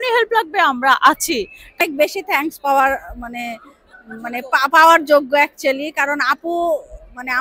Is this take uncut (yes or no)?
no